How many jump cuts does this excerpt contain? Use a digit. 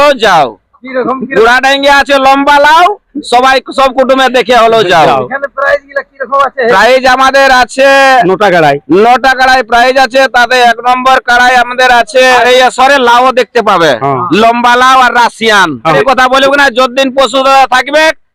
2